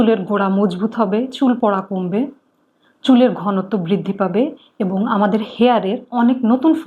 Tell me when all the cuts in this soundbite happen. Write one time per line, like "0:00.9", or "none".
none